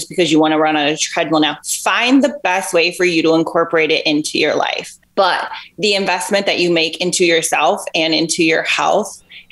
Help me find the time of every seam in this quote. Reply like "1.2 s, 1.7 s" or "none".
none